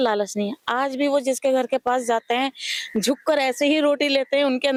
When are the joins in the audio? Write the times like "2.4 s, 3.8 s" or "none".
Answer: none